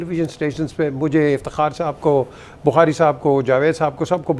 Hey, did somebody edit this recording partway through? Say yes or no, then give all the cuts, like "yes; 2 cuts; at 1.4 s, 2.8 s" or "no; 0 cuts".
no; 0 cuts